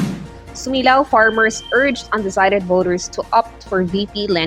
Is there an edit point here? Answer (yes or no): no